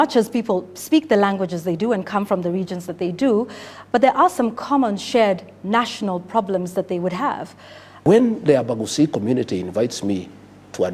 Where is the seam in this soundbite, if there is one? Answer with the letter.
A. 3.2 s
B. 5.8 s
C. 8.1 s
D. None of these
C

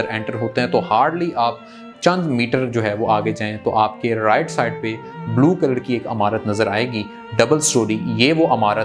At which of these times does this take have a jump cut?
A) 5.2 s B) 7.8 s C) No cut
C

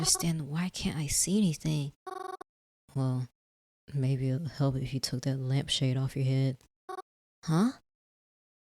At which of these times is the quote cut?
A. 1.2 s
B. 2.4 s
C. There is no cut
B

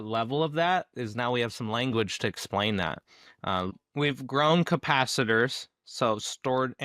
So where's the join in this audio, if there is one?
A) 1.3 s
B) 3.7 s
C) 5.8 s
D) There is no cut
B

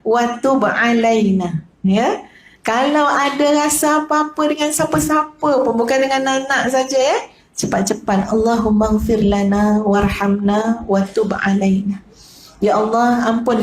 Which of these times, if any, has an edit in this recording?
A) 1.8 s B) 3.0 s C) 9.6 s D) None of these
A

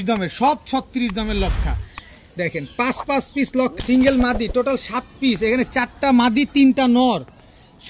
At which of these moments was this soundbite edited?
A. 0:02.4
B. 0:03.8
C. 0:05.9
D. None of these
B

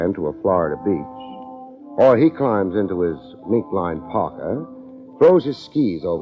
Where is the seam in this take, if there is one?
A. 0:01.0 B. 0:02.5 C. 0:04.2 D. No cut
C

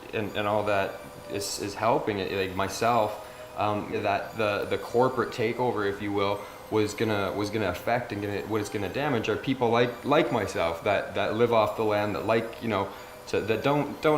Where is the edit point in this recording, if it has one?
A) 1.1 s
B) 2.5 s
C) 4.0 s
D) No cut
C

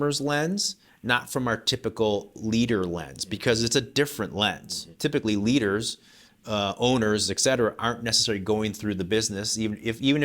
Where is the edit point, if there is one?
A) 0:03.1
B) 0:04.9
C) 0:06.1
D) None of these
B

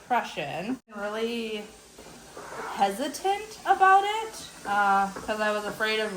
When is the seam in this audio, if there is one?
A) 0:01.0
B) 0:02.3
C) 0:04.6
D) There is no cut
A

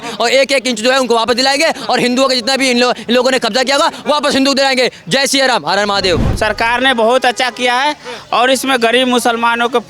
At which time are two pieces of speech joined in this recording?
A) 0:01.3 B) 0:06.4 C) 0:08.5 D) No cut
B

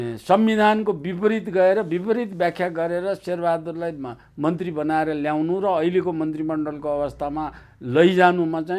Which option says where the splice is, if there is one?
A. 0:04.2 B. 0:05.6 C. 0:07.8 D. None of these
D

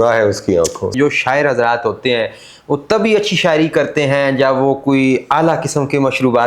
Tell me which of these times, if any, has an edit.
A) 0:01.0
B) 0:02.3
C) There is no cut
A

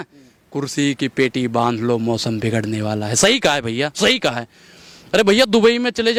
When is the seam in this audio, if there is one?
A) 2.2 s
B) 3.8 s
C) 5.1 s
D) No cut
D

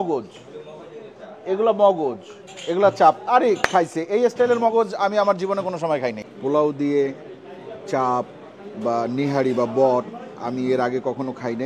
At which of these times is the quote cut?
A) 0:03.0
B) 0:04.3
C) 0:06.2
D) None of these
C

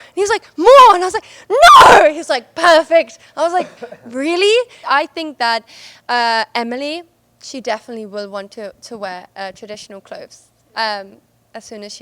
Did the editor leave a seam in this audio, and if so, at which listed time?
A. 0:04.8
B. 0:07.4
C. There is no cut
A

